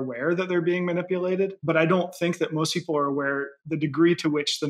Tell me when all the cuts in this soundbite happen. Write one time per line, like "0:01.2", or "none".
0:01.6